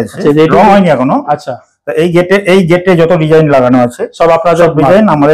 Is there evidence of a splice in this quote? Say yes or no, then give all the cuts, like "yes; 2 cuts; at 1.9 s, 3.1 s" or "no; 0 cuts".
no; 0 cuts